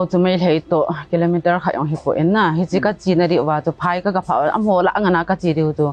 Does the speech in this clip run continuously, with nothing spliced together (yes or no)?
yes